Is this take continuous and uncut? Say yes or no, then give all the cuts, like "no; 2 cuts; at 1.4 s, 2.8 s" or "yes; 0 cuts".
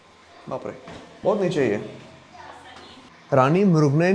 yes; 0 cuts